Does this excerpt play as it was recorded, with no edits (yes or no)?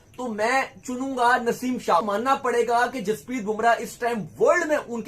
no